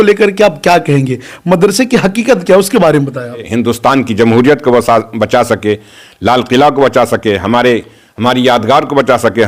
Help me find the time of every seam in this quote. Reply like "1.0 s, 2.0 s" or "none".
3.5 s